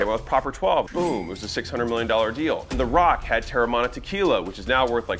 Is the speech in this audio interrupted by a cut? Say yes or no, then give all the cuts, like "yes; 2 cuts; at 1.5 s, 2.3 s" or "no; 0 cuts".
yes; 2 cuts; at 0.9 s, 2.7 s